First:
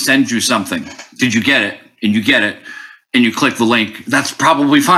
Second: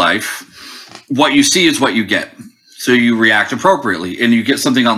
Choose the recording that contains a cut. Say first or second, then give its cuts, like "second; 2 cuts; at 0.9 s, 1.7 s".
first; 1 cut; at 1.0 s